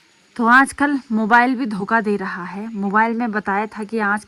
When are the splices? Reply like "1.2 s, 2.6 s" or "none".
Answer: none